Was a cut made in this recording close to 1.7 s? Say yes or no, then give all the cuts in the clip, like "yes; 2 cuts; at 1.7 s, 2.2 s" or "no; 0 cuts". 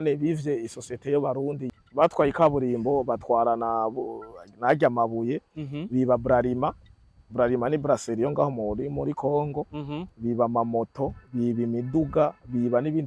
yes; 1 cut; at 1.7 s